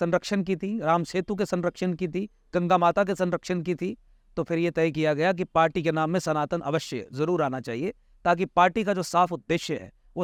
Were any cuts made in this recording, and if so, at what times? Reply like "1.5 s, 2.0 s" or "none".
none